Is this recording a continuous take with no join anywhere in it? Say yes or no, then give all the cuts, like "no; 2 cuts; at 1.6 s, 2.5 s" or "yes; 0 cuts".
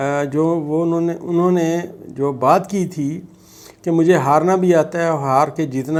yes; 0 cuts